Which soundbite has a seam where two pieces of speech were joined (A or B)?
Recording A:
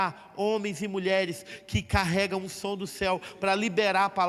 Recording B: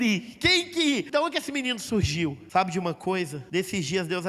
B